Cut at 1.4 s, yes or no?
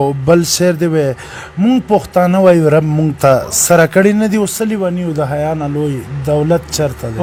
no